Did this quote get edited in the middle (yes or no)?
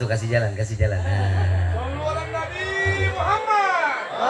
no